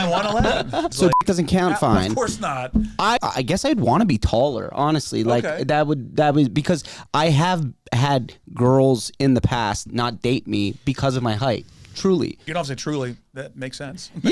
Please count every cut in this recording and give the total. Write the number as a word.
three